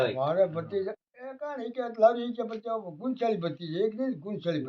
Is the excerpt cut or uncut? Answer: uncut